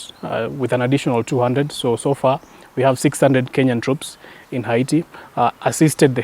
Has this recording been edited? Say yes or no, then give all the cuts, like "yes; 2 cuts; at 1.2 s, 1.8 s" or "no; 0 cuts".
yes; 1 cut; at 5.2 s